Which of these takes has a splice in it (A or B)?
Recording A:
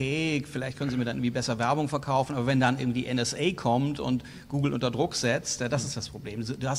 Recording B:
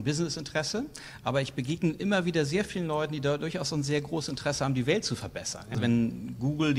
B